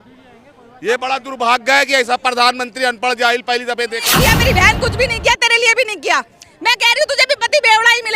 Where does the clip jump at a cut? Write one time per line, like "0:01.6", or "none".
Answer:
0:04.0